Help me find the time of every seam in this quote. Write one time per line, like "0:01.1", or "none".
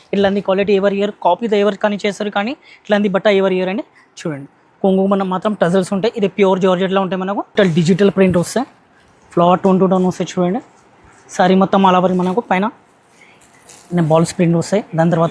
0:07.5

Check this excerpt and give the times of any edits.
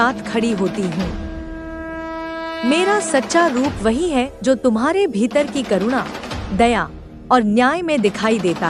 0:01.1
0:02.6

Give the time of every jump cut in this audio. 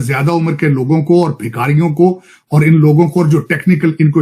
none

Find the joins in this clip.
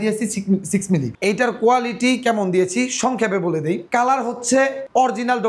0:01.1

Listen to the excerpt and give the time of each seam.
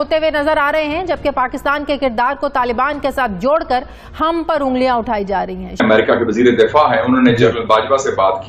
0:05.8

